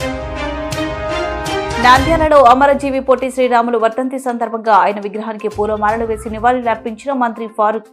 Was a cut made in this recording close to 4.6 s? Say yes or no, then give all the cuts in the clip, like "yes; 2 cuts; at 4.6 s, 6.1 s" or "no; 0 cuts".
no; 1 cut; at 1.8 s